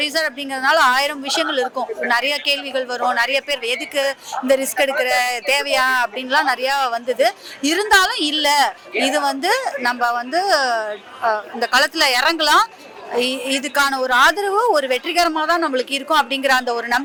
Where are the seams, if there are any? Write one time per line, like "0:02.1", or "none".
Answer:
none

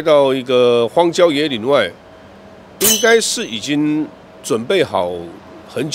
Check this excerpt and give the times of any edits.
none

